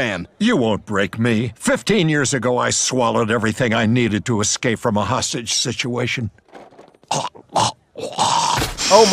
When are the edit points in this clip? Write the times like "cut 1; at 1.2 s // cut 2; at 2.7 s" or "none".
none